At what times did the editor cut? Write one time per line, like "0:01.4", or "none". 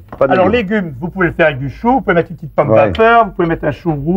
none